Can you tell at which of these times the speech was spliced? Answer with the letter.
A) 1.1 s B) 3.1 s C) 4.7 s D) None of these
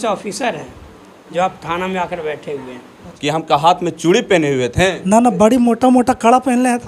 B